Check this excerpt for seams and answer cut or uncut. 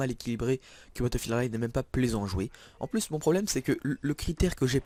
uncut